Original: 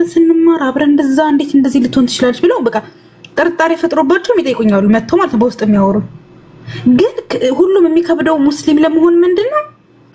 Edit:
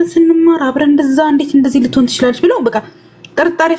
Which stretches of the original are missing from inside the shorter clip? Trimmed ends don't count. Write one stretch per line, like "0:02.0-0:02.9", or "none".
none